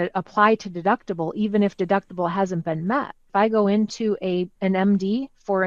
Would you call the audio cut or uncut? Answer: cut